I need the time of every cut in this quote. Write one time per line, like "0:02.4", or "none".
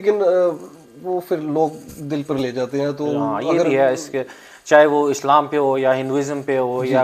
none